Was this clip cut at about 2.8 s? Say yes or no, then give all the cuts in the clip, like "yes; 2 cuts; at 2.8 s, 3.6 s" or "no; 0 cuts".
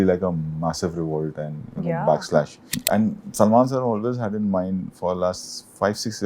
yes; 1 cut; at 2.8 s